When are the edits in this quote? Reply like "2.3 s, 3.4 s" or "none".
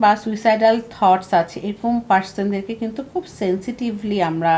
none